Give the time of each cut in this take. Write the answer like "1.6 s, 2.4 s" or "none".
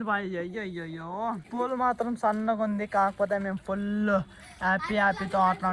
1.5 s